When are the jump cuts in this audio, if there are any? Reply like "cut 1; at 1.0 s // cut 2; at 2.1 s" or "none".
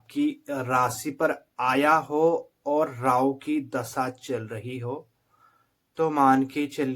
none